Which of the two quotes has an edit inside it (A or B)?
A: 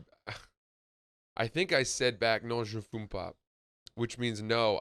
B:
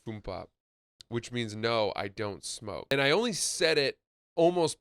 B